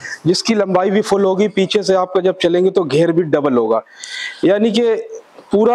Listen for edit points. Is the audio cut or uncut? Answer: uncut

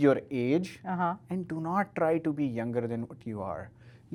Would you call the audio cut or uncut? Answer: uncut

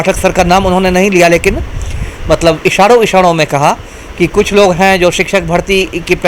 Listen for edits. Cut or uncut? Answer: uncut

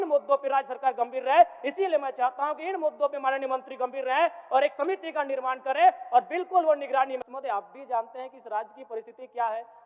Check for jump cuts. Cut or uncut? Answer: cut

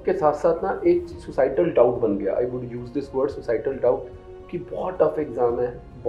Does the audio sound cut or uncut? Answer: uncut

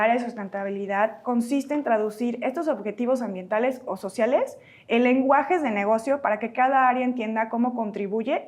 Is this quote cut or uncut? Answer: uncut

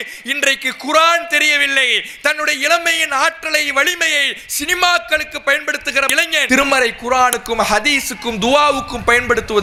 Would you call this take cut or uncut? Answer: uncut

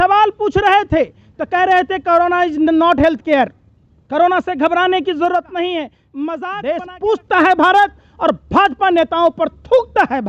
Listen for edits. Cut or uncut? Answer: cut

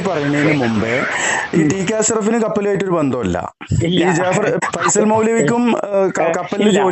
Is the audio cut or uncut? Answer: uncut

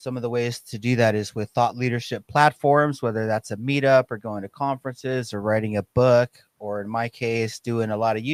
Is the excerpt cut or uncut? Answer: uncut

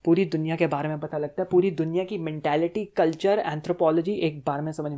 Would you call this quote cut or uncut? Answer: uncut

